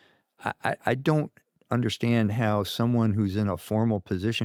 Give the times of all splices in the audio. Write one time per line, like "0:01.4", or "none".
none